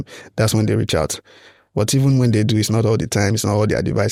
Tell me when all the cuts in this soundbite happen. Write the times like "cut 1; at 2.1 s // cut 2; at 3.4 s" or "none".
none